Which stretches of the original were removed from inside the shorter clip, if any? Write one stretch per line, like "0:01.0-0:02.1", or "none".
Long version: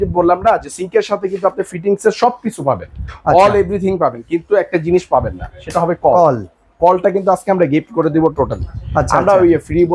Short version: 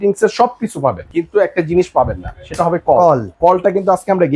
0:03.0-0:04.3
0:06.5-0:06.7